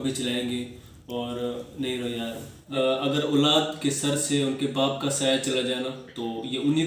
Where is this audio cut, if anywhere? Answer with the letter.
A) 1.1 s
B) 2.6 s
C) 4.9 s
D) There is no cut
B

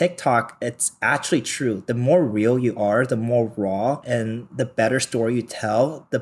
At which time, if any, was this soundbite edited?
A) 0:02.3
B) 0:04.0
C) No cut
B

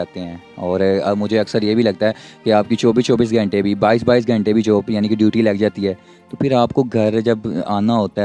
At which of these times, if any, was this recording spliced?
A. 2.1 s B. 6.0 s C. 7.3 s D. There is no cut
D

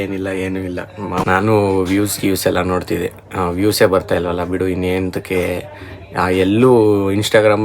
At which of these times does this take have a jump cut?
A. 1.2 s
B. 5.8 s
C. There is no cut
A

